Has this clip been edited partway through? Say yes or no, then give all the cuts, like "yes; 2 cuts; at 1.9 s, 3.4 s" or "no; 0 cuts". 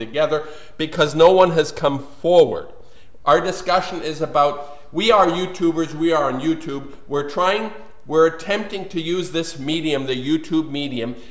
yes; 1 cut; at 7.9 s